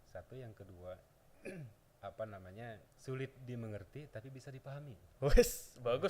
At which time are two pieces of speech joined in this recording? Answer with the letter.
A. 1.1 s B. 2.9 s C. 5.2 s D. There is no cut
B